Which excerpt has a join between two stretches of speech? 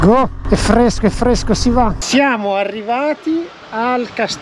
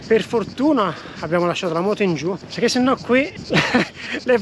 first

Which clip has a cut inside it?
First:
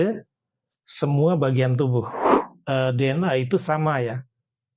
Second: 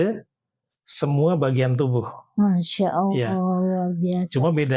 first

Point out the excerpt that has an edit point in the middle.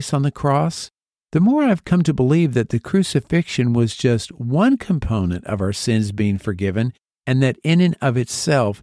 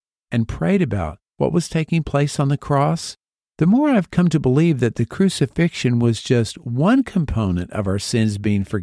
second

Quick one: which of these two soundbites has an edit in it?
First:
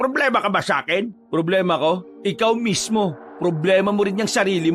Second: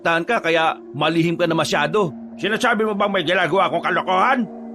first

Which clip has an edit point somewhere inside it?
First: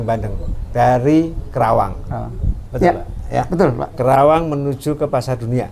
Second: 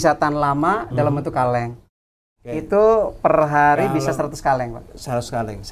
second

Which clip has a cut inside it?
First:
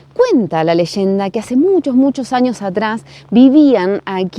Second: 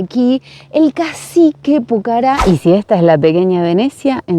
second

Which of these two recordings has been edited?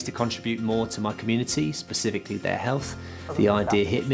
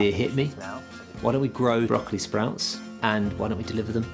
second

